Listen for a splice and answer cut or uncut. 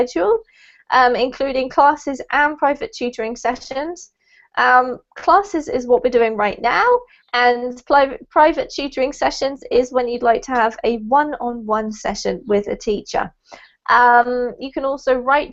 uncut